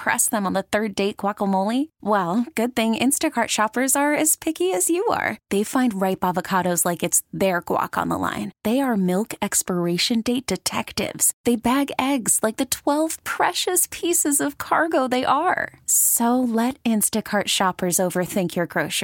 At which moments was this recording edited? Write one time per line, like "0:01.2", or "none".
none